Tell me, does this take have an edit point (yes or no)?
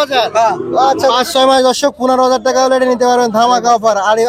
yes